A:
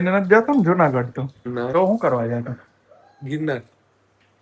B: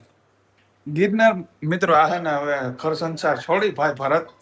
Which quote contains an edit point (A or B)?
A